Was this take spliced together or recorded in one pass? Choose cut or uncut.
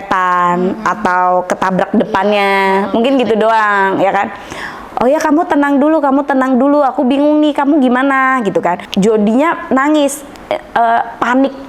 cut